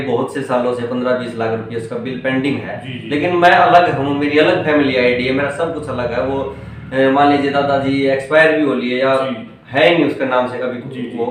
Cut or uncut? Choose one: uncut